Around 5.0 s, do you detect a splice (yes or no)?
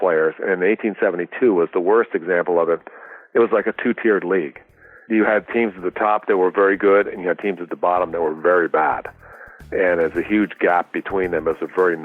yes